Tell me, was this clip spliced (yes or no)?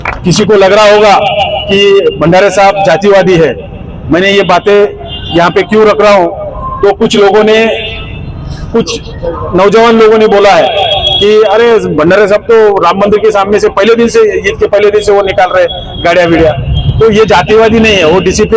no